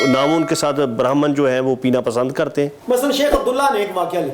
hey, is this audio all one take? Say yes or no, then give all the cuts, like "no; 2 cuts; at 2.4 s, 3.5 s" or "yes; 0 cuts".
no; 1 cut; at 2.8 s